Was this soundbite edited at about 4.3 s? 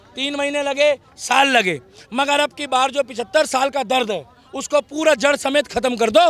no; 0 cuts

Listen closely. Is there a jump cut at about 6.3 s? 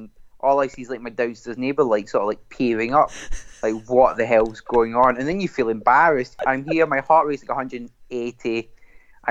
yes; 1 cut; at 6.3 s

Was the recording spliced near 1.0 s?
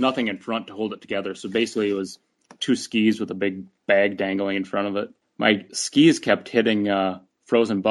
no; 1 cut; at 5.2 s

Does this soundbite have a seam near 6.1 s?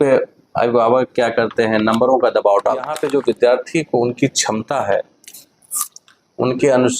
no; 1 cut; at 3.0 s

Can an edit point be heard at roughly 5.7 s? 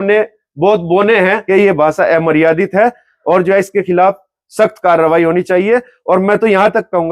no; 1 cut; at 1.4 s

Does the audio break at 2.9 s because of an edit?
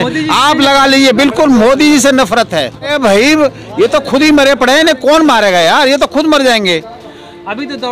yes; 1 cut; at 2.9 s

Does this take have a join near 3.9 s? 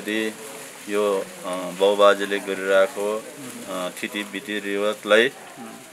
no; 0 cuts

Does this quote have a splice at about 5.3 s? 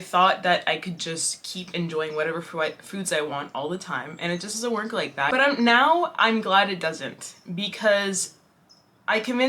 yes; 1 cut; at 5.3 s

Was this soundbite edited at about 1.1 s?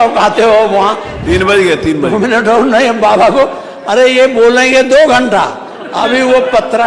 yes; 1 cut; at 1.1 s

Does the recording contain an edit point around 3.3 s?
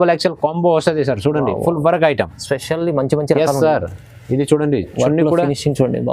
no; 0 cuts

